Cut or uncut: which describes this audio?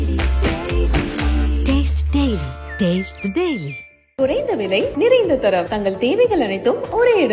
uncut